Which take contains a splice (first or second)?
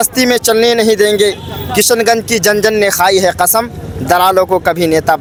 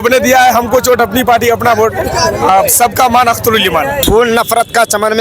second